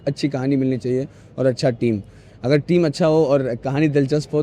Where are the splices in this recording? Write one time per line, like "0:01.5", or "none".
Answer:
none

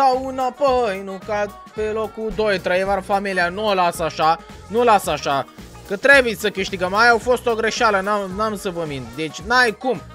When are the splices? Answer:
none

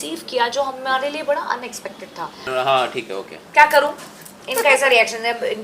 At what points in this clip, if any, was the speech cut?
0:02.5

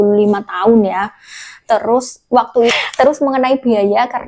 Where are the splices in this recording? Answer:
0:02.7

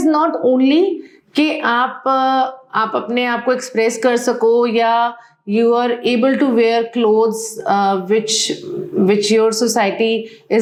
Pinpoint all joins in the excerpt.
none

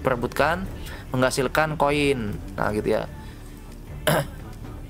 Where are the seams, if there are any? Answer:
none

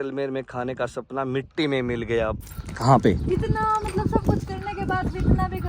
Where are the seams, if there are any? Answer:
0:02.4

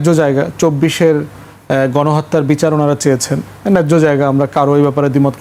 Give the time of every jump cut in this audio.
none

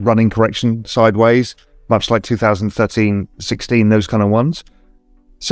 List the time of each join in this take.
none

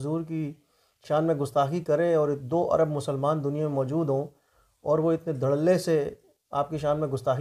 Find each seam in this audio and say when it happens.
none

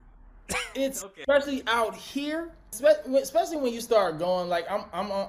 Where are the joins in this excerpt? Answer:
0:01.1
0:02.7

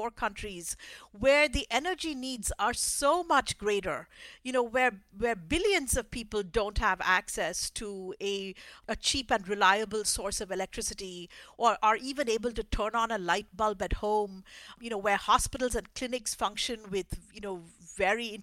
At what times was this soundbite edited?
none

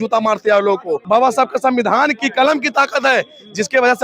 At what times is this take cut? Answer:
0:01.0

